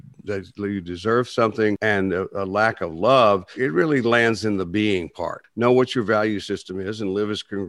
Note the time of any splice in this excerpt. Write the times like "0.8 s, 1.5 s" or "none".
1.8 s, 3.5 s, 5.4 s